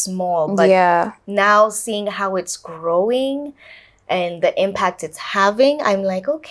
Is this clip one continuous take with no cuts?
yes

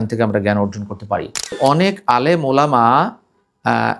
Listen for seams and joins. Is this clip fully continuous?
no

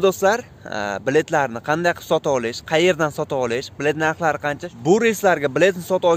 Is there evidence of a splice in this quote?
yes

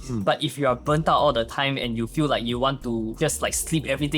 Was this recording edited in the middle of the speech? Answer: yes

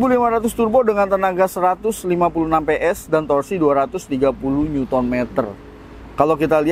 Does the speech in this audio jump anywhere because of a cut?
no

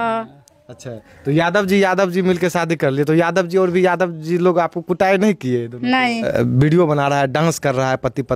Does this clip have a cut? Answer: yes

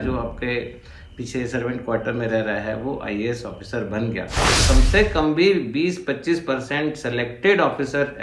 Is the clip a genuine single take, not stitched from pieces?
no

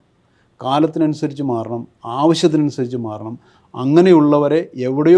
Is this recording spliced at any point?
no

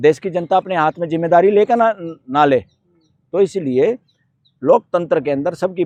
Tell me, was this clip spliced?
no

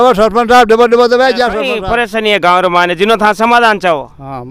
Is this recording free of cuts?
no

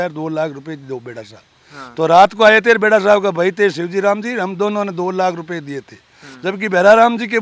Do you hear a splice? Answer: no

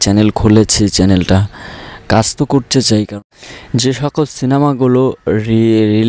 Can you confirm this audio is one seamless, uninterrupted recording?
no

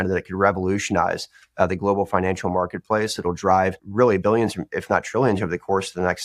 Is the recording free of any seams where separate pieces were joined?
no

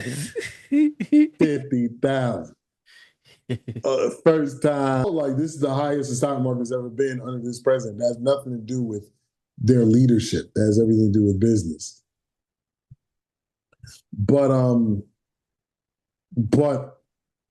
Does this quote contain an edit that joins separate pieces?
yes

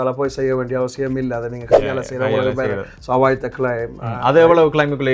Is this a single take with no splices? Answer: yes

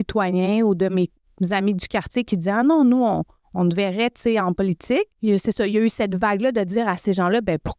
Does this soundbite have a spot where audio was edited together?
yes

